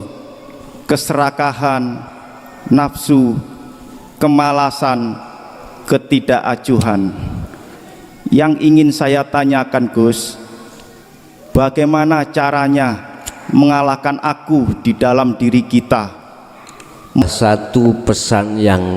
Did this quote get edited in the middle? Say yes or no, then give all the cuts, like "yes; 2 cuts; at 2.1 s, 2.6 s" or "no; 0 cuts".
yes; 1 cut; at 17.2 s